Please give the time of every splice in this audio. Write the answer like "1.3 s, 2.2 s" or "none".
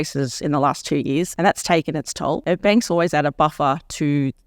1.3 s, 2.4 s